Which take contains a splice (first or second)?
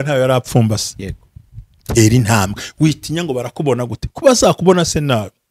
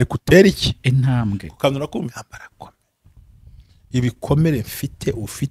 second